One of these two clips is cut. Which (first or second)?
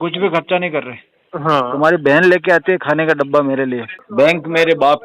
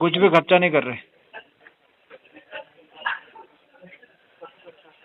first